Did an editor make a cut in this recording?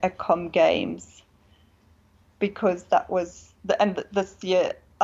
no; 0 cuts

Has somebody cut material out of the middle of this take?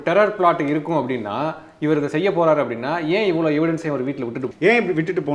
yes; 1 cut; at 4.4 s

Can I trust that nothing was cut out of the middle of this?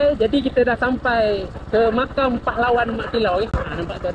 yes; 0 cuts

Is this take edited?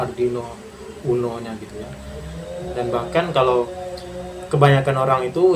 yes; 1 cut; at 1.7 s

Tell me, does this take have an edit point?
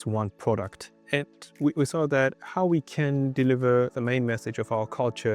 yes; 2 cuts; at 1.4 s, 3.9 s

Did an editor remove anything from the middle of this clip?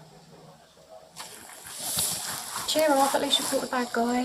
no; 0 cuts

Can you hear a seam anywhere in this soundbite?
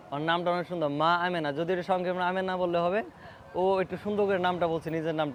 no; 0 cuts

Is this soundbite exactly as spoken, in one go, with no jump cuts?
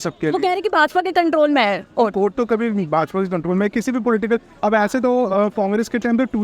yes; 0 cuts

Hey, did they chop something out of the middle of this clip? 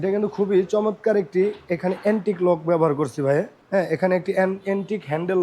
yes; 1 cut; at 3.6 s

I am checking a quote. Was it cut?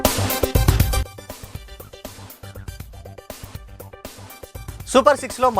yes; 2 cuts; at 1.1 s, 4.8 s

